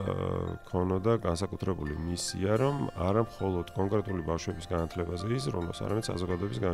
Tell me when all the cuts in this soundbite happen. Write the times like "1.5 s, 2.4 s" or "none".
none